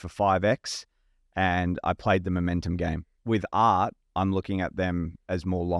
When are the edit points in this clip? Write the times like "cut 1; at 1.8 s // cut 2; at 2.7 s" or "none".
cut 1; at 3.1 s